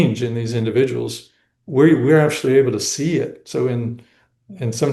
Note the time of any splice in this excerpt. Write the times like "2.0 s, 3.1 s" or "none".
none

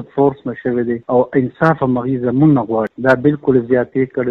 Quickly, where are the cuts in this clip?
2.9 s

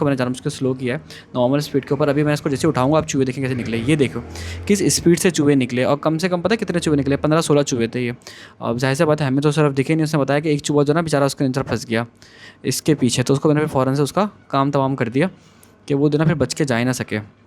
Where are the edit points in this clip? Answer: none

